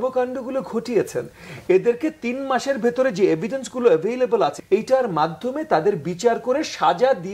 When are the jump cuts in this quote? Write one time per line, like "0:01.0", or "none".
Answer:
0:04.6